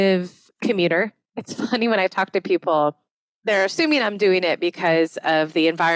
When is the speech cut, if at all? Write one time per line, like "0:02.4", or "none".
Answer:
0:01.2